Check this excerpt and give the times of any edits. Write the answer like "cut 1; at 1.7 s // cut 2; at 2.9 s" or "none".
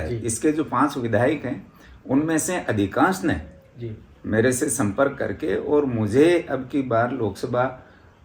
none